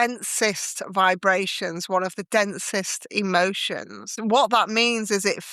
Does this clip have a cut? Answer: yes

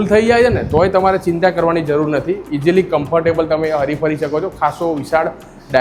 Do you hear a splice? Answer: no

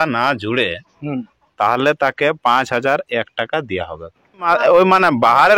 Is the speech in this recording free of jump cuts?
no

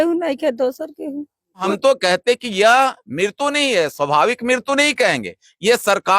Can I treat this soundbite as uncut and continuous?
no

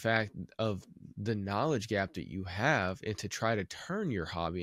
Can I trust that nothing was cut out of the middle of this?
yes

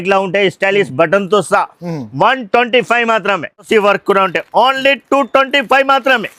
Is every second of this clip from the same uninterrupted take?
no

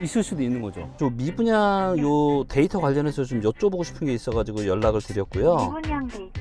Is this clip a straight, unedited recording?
no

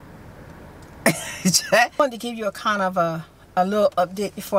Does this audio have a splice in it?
yes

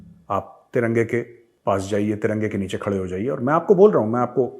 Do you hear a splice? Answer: yes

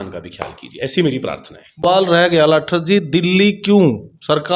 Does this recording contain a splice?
no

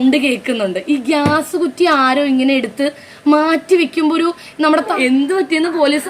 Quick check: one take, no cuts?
no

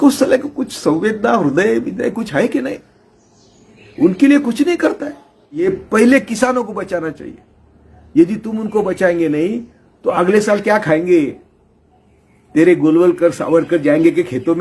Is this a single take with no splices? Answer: no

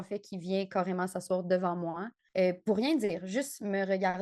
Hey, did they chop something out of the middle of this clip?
no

